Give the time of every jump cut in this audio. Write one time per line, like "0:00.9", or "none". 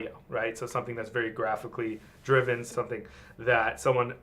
0:02.7